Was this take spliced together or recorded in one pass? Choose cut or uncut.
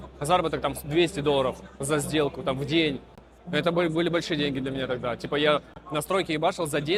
uncut